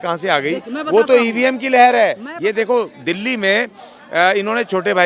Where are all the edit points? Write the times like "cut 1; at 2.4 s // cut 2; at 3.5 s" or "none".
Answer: cut 1; at 2.3 s